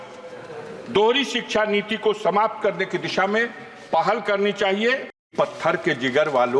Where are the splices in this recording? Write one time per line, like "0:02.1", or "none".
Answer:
0:05.3

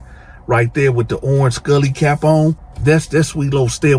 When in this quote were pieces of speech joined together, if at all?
0:02.7

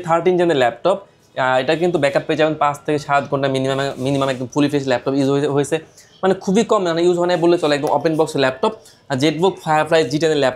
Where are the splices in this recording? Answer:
none

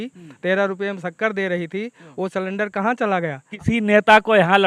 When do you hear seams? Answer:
0:03.5

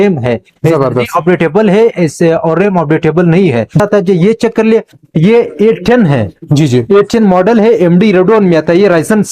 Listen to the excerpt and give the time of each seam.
0:03.8

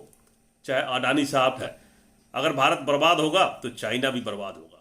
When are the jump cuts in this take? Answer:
0:01.6

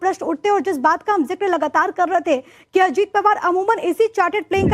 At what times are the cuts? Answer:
0:01.9

